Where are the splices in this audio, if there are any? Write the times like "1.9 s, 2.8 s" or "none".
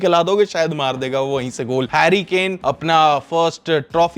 1.9 s, 2.6 s

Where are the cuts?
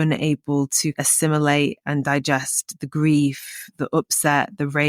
1.0 s

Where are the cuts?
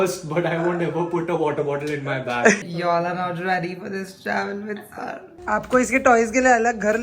2.6 s, 5.4 s

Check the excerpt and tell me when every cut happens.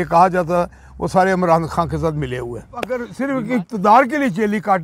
3.1 s

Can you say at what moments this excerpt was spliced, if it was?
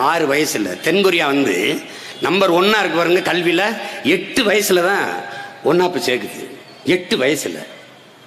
none

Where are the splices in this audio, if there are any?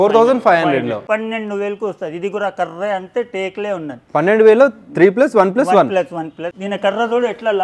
1.0 s, 6.4 s

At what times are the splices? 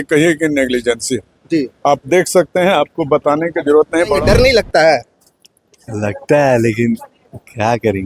4.2 s

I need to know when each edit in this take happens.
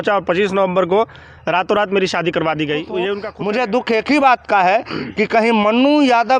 3.2 s

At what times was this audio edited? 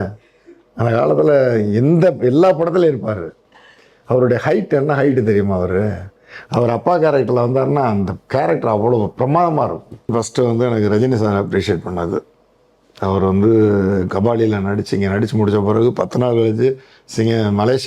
10.1 s

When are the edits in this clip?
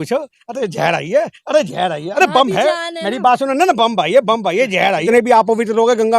5.0 s

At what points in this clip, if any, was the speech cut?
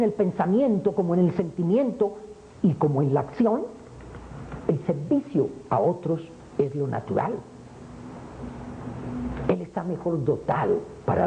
none

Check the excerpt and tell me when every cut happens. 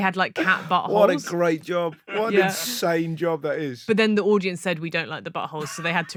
none

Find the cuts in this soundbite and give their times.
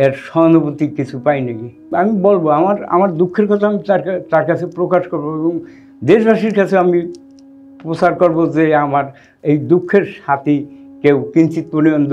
1.9 s

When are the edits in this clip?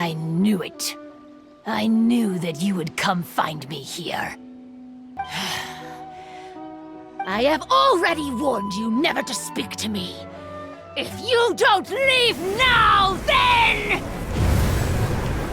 5.0 s

